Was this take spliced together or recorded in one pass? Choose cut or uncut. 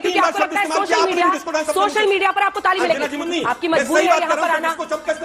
cut